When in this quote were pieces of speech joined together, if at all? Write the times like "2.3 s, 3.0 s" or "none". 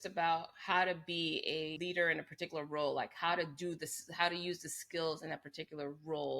1.7 s